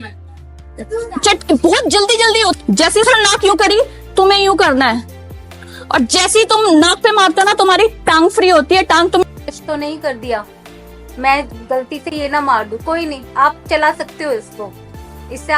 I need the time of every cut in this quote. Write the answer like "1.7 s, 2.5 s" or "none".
2.6 s, 9.2 s

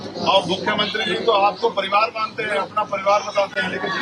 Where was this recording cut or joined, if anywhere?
none

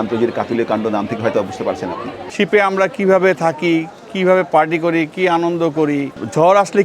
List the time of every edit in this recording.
2.2 s

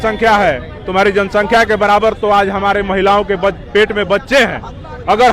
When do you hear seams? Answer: none

